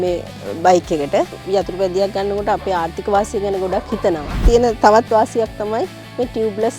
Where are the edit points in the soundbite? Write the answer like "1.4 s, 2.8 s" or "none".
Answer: 1.4 s, 4.5 s